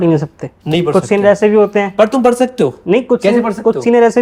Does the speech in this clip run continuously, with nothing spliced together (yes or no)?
yes